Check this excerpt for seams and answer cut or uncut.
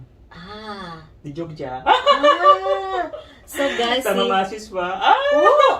cut